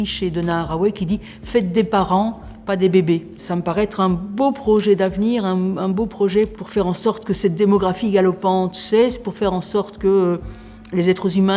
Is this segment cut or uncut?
uncut